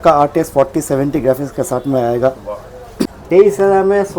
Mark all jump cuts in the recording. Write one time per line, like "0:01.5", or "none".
0:03.0